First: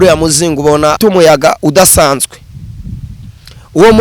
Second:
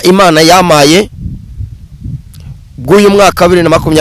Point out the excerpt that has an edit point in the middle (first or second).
first